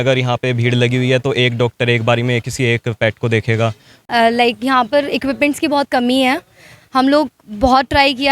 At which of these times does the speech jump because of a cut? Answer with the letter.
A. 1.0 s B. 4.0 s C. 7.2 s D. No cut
B